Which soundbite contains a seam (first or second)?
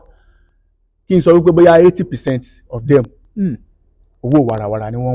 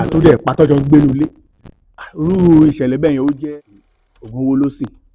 second